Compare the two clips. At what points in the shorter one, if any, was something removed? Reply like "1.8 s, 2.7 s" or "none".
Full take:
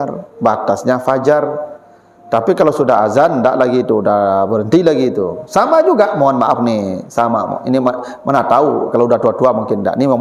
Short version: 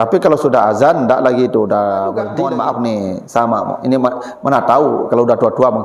2.3 s